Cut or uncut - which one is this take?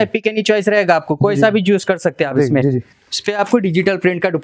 cut